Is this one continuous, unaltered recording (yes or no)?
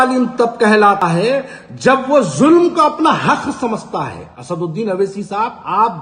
no